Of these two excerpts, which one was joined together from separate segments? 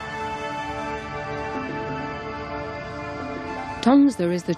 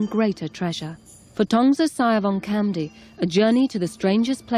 first; 1 cut; at 2.8 s

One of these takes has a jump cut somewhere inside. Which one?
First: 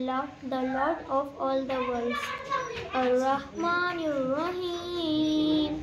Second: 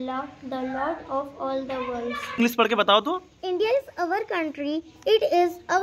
second; 1 cut; at 2.4 s

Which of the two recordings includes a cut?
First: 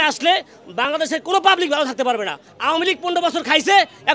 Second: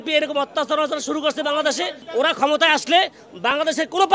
first; 1 cut; at 2.5 s

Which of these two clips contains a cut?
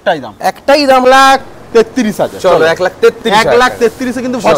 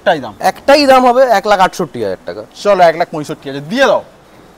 first; 1 cut; at 1.0 s

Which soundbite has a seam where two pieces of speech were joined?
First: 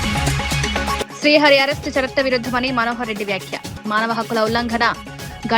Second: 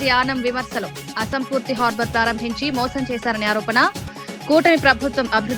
first; 1 cut; at 1.0 s

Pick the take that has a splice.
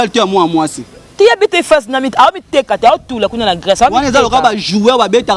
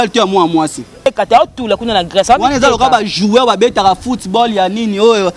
second; 1 cut; at 0.9 s

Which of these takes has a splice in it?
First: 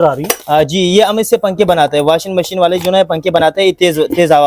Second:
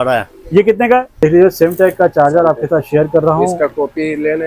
second; 1 cut; at 1.2 s

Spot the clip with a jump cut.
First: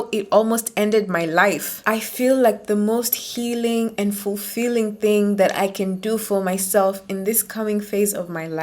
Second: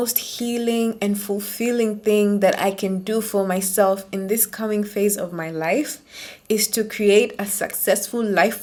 first; 1 cut; at 1.7 s

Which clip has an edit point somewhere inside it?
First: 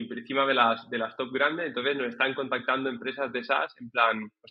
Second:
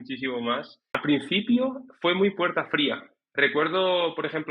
second; 1 cut; at 0.9 s

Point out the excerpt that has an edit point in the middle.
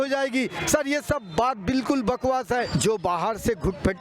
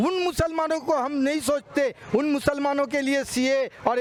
first; 1 cut; at 2.7 s

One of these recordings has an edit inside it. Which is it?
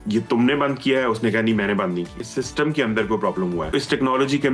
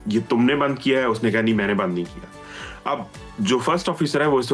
first; 2 cuts; at 2.2 s, 3.7 s

